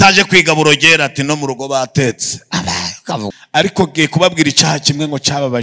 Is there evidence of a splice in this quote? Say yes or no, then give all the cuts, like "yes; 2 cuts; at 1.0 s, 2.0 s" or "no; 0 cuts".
yes; 1 cut; at 3.4 s